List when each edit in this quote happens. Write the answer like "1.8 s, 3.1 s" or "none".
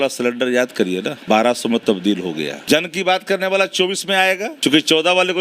1.2 s, 2.7 s, 4.5 s